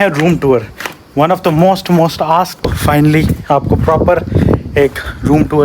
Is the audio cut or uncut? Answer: cut